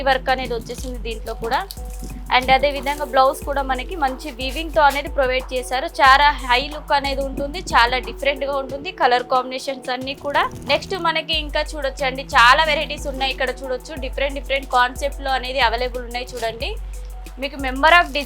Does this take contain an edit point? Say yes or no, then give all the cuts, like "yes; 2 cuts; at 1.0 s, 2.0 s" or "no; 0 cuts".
yes; 1 cut; at 10.6 s